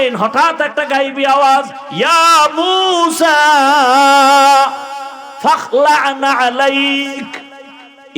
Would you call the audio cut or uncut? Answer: cut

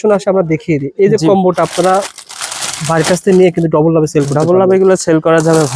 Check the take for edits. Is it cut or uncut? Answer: uncut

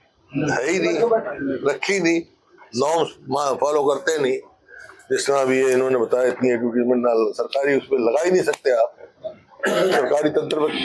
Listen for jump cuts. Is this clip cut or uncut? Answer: uncut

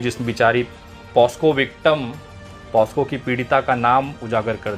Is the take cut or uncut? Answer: uncut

